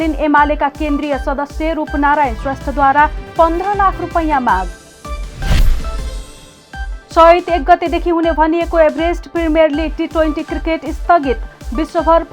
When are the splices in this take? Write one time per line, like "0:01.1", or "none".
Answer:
0:07.1